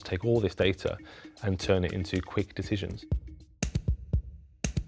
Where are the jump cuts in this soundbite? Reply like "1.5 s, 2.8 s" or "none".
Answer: 3.0 s